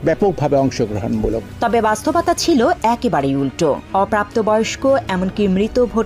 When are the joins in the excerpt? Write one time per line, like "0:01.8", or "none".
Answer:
none